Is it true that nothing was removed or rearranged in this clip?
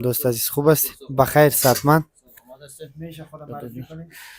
yes; 0 cuts

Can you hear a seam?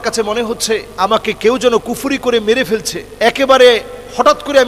yes; 2 cuts; at 0.9 s, 3.0 s

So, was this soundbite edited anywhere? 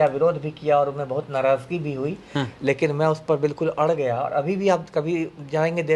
no; 0 cuts

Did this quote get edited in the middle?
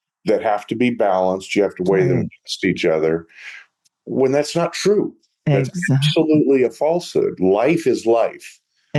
no; 0 cuts

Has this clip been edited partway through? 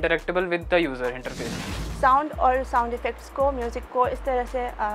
yes; 1 cut; at 1.6 s

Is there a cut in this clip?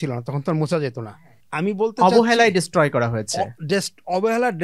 yes; 1 cut; at 1.1 s

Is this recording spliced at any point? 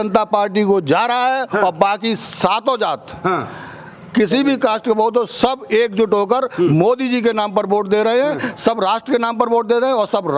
no; 0 cuts

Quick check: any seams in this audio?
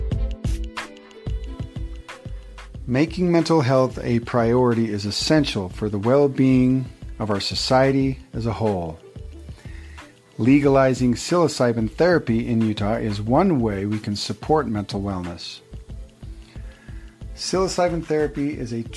no; 0 cuts

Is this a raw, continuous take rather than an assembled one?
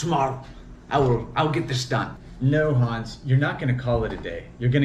no; 1 cut; at 2.2 s

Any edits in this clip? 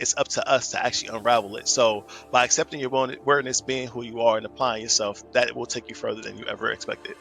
no; 0 cuts

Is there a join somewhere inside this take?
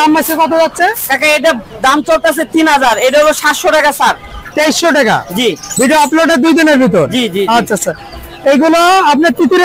no; 0 cuts

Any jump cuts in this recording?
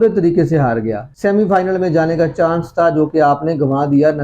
yes; 1 cut; at 1.0 s

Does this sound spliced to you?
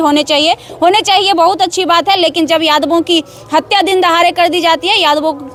no; 0 cuts

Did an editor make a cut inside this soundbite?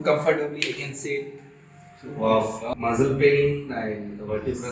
yes; 1 cut; at 2.7 s

